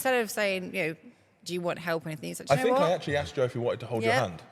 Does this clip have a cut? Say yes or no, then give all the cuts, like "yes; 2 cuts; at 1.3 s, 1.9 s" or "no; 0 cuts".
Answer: no; 0 cuts